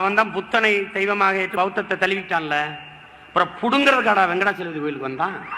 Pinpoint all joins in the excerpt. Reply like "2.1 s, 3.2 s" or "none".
1.5 s